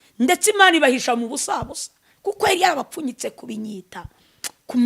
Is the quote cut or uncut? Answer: uncut